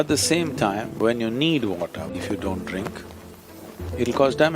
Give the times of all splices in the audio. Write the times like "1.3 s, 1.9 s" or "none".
2.1 s